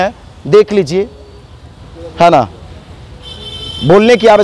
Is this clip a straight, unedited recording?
yes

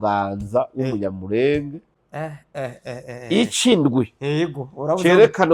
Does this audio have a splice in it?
yes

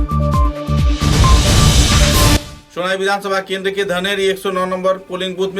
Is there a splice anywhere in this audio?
yes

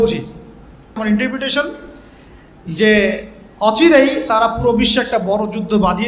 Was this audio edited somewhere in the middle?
yes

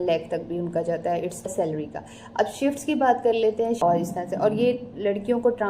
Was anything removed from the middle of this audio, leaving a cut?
yes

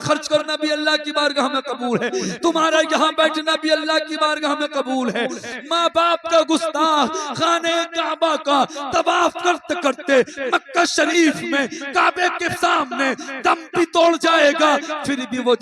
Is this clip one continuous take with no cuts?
no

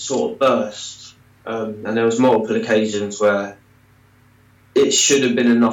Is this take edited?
no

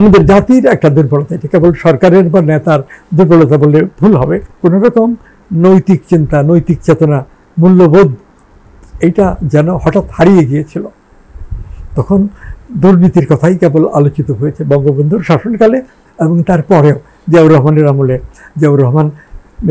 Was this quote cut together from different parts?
yes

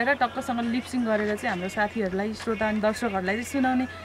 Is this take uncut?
yes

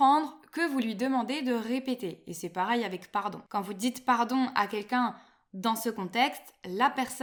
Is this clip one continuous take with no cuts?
yes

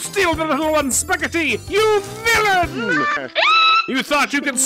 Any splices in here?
yes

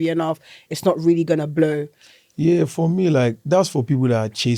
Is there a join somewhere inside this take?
no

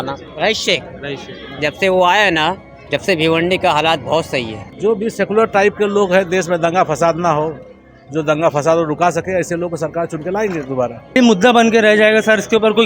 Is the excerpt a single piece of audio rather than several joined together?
no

